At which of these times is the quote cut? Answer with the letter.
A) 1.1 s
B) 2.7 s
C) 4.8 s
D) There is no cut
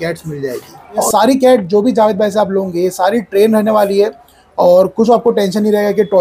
A